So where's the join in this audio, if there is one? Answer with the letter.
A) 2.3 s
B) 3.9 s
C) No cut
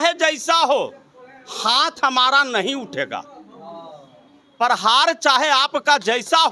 C